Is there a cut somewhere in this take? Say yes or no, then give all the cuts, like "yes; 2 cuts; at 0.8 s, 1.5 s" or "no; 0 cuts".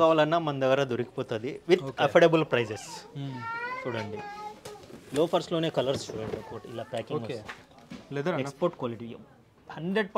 no; 0 cuts